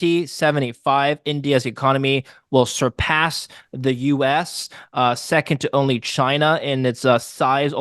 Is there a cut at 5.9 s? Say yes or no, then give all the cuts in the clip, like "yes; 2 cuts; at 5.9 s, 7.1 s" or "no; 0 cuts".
no; 0 cuts